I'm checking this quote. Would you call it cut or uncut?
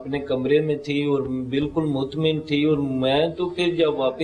uncut